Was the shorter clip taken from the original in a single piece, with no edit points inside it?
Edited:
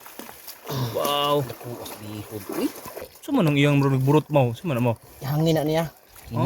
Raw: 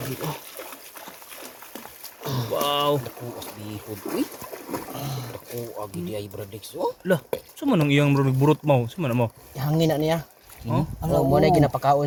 no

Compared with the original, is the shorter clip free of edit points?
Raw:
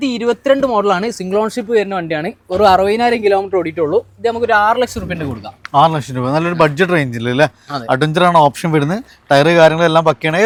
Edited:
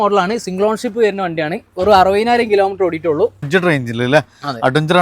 no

